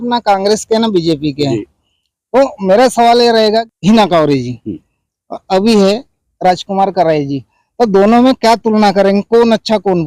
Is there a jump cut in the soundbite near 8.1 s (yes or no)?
no